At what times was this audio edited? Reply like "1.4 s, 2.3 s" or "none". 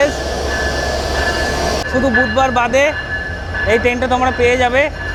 none